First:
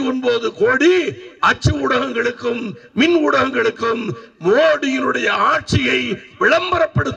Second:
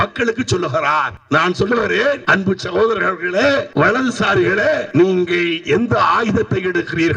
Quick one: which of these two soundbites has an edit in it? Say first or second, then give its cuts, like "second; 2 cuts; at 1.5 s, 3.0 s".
second; 4 cuts; at 1.2 s, 2.2 s, 3.7 s, 4.9 s